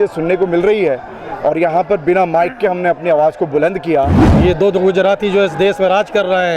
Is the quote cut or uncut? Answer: cut